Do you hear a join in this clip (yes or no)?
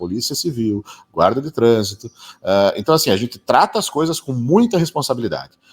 no